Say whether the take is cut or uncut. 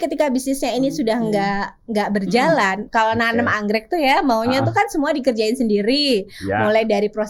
cut